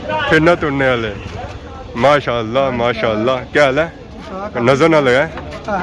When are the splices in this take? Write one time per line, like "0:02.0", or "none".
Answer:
none